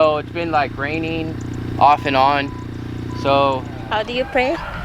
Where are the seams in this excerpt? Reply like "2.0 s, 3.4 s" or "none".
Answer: 3.8 s